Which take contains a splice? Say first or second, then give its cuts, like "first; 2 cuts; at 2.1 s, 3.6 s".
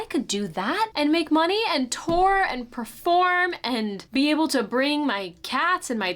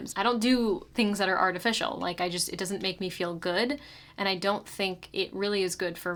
first; 2 cuts; at 0.9 s, 4.0 s